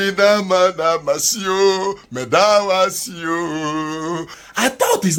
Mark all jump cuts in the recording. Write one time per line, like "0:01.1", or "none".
none